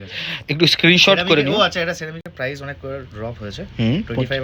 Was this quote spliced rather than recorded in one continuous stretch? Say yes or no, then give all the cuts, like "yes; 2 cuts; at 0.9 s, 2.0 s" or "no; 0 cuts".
no; 0 cuts